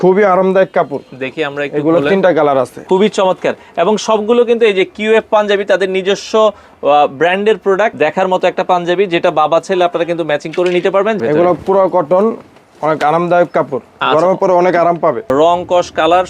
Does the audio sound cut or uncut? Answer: cut